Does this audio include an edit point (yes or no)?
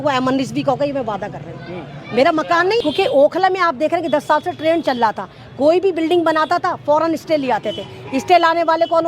yes